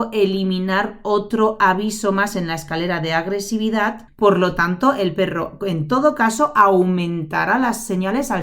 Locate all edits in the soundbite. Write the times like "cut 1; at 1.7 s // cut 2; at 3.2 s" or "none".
cut 1; at 4.0 s